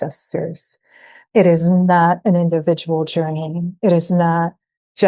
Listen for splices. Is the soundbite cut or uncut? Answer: uncut